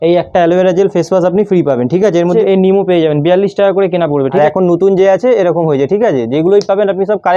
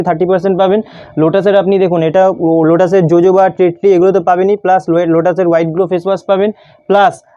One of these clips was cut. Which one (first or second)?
first